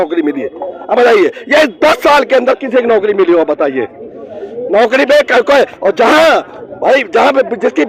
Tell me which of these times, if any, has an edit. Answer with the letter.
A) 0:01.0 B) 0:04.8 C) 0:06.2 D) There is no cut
D